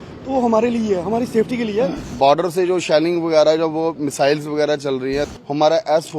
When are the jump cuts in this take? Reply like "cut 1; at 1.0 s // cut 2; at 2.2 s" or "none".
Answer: cut 1; at 2.1 s // cut 2; at 5.3 s